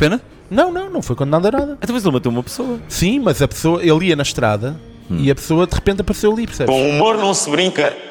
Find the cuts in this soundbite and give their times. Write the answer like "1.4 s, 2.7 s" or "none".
6.7 s